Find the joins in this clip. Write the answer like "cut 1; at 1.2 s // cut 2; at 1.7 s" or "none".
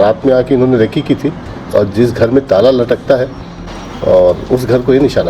none